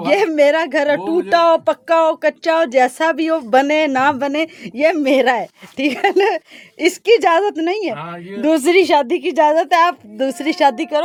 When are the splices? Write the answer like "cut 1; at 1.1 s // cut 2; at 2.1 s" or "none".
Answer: none